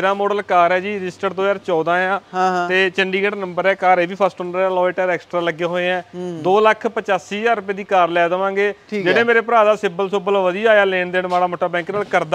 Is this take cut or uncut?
uncut